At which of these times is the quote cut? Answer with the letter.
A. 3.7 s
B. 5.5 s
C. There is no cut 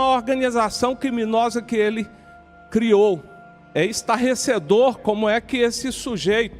A